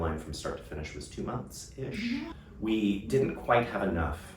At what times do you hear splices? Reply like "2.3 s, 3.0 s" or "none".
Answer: 2.4 s

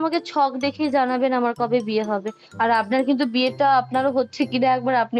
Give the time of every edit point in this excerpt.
none

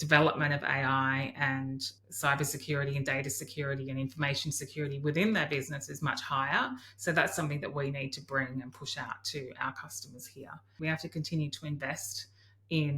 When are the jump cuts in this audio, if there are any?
10.8 s

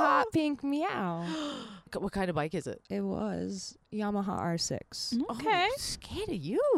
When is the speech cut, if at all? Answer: 1.9 s, 3.8 s

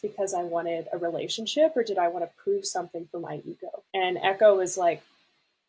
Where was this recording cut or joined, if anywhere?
none

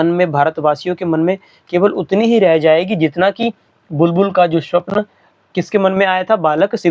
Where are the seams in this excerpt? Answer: none

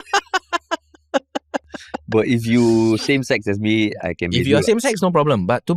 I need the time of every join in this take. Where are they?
none

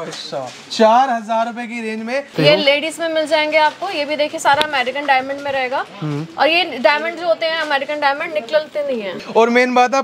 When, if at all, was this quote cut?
2.3 s, 9.1 s

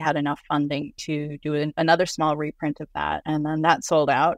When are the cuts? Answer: 1.7 s, 3.2 s

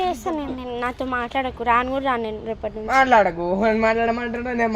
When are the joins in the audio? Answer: none

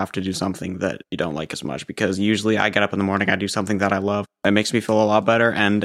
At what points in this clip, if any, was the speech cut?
4.4 s

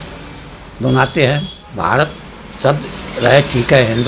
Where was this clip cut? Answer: 1.6 s

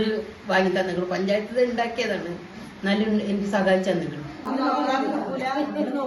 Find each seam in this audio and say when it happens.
4.5 s

